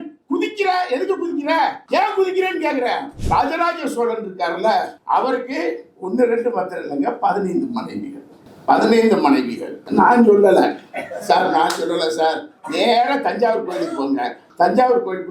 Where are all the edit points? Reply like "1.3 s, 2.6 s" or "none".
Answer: 3.2 s, 5.0 s, 9.7 s